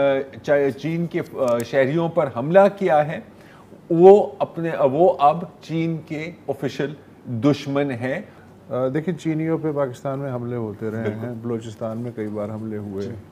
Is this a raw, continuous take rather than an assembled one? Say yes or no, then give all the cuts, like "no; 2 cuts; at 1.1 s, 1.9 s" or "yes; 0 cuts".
yes; 0 cuts